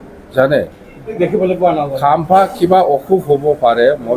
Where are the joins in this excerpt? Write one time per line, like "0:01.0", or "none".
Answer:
0:01.2

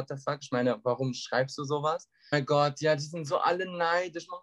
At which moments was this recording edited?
0:02.3

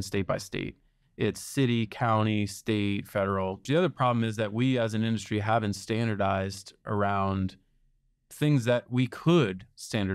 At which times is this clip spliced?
0:03.6

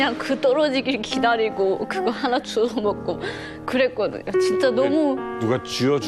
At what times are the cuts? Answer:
none

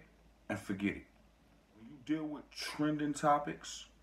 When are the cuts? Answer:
0:01.9

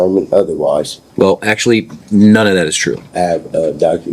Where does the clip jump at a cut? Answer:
0:01.0
0:03.1

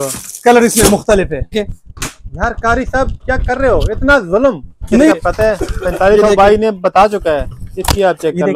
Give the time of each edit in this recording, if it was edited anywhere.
0:01.5
0:05.1

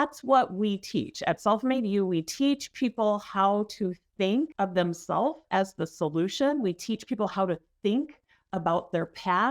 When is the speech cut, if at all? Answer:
0:04.5

